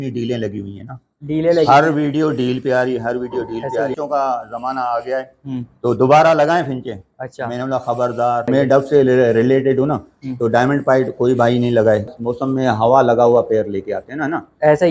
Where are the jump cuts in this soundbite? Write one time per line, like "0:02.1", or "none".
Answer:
0:04.0
0:08.5
0:12.1